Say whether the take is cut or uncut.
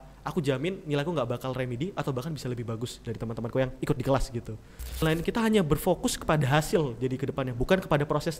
cut